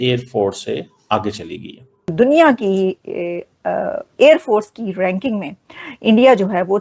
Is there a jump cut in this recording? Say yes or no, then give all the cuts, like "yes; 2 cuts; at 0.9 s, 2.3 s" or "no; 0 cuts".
yes; 1 cut; at 2.1 s